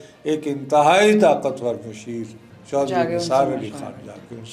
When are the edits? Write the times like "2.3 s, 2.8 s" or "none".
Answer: none

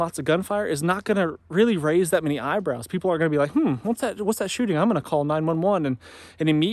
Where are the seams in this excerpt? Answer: none

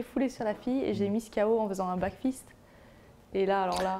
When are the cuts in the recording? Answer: none

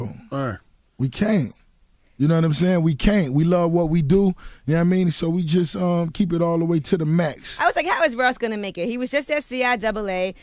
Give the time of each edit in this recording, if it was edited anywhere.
9.2 s

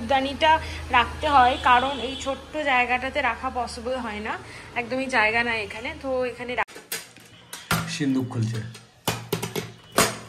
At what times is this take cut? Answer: 6.7 s

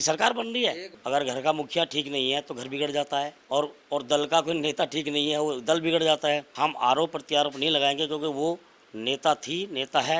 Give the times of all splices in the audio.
0.9 s, 3.4 s, 6.5 s

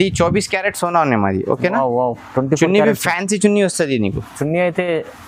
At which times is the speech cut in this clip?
none

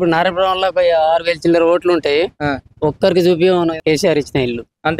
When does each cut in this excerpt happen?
3.8 s

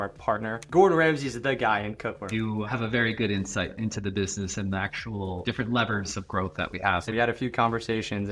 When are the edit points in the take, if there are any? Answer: 2.2 s, 7.1 s

